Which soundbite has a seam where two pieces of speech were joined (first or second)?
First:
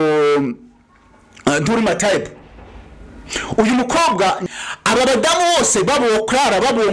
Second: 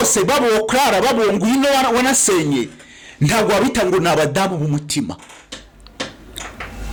first